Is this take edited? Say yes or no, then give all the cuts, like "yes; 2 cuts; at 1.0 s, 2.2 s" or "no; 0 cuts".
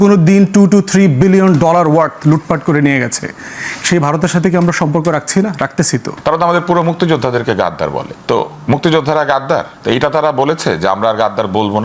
yes; 3 cuts; at 6.1 s, 8.1 s, 9.7 s